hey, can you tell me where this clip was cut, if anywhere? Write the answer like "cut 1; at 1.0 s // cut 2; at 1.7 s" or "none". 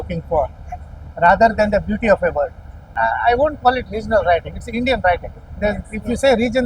cut 1; at 2.9 s

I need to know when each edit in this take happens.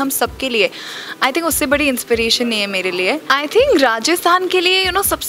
cut 1; at 3.2 s

